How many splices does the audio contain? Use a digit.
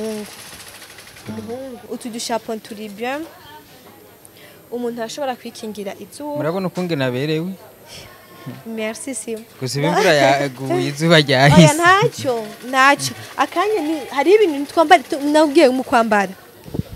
1